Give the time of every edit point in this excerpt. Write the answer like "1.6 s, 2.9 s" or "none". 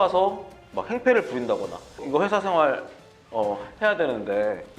2.0 s